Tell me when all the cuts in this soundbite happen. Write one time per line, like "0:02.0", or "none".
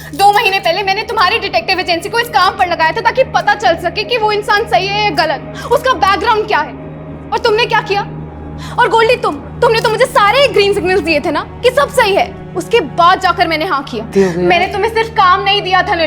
0:14.1